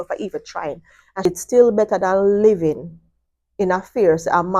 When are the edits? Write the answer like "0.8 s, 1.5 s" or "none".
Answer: 1.3 s